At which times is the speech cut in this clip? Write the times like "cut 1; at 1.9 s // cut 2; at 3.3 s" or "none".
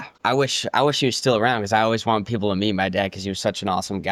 none